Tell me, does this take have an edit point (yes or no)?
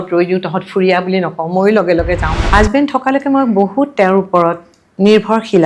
yes